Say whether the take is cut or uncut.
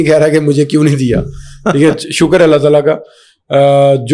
uncut